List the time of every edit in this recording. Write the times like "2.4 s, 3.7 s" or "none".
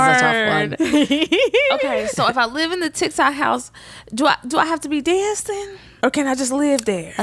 none